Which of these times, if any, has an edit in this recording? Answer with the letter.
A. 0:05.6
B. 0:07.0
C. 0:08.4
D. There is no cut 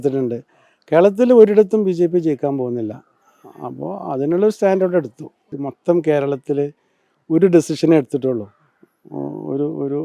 A